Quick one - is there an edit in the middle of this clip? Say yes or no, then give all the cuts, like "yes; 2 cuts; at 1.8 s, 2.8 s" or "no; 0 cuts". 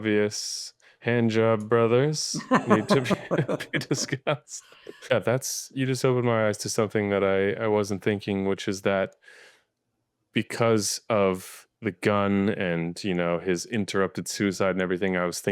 yes; 1 cut; at 5.1 s